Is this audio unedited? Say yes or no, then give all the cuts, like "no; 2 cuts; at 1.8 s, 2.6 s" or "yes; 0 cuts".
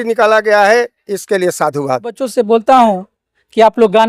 no; 1 cut; at 2.2 s